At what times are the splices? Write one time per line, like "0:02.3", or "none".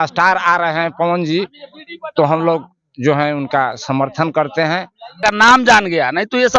0:05.2